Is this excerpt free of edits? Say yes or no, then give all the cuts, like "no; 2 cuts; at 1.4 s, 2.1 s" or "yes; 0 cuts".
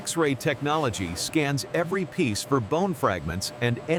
yes; 0 cuts